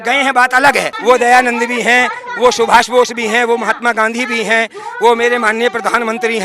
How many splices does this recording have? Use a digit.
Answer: 1